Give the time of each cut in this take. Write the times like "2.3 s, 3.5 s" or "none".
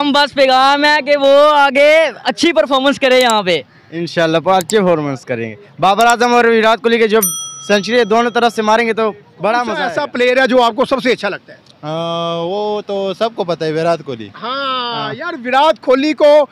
9.8 s